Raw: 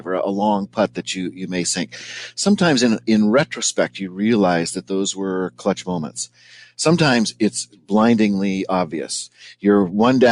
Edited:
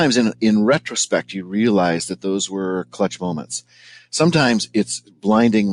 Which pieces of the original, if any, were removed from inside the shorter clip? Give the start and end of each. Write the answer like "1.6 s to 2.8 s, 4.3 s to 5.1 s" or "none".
none